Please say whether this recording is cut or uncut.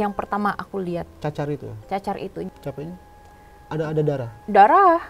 cut